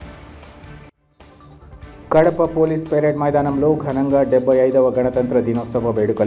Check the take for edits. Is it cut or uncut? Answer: cut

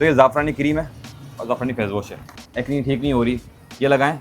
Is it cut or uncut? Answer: cut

